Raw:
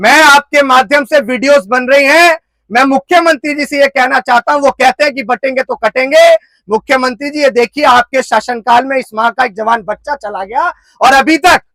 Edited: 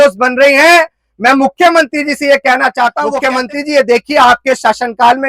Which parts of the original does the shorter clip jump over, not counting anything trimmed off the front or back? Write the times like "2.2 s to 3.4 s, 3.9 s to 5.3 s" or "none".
4.6 s to 6.8 s